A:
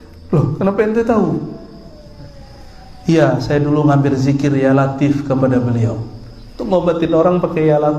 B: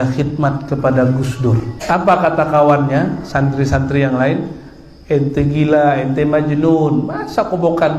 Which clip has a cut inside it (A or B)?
B